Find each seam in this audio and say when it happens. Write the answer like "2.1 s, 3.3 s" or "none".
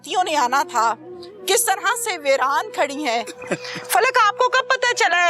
3.4 s